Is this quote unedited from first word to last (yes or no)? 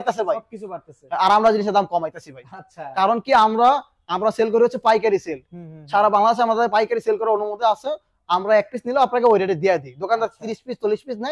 yes